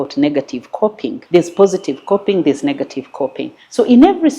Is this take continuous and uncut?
no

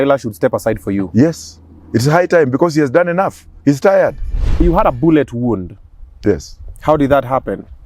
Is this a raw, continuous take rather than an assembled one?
no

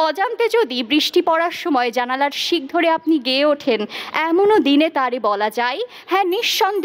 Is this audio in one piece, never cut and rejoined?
yes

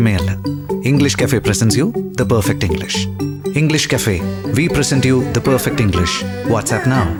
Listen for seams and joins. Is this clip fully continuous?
yes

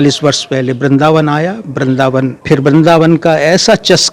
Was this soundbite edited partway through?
yes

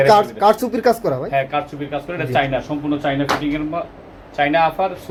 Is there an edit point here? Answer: no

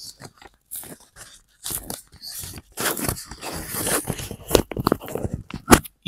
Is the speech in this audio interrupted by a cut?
no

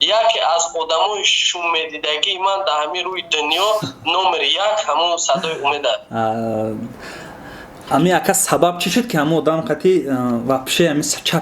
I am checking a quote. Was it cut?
no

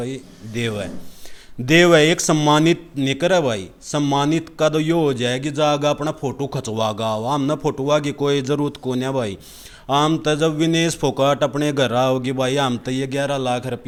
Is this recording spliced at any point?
no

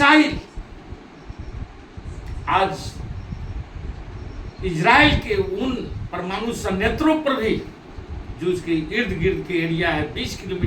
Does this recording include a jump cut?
no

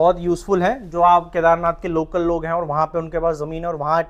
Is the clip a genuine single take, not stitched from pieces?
yes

